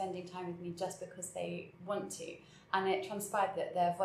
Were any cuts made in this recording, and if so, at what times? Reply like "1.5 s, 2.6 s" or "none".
none